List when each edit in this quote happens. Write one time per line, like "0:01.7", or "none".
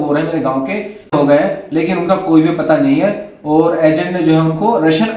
0:01.1